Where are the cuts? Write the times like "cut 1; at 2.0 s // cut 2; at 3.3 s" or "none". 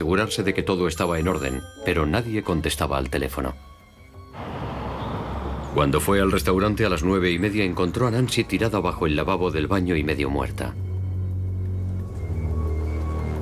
cut 1; at 5.2 s